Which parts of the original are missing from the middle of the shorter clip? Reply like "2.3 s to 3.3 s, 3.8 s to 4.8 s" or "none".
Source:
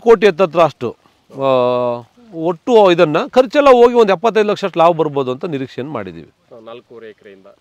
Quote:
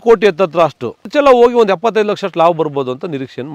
1.1 s to 3.5 s